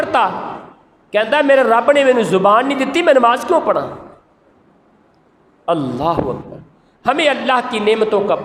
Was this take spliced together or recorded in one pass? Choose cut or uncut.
uncut